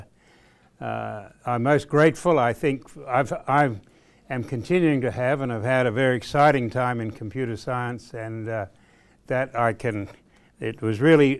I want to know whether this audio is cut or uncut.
cut